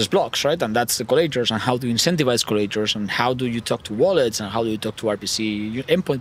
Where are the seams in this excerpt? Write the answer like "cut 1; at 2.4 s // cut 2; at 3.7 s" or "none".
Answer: none